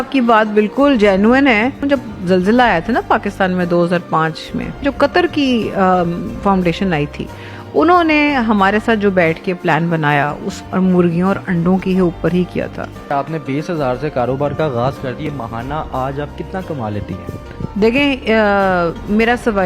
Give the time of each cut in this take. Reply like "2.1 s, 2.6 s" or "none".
1.8 s, 4.8 s, 10.5 s, 13.1 s, 15.2 s